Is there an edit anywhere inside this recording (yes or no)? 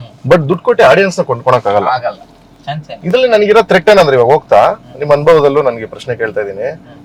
no